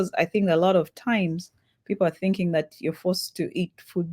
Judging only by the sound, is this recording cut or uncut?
uncut